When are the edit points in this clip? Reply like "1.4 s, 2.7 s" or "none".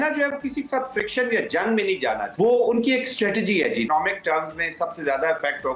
2.3 s, 3.9 s

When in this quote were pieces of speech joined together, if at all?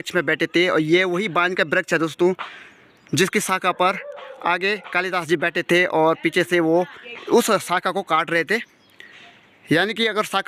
none

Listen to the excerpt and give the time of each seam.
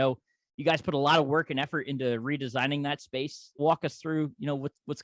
3.6 s

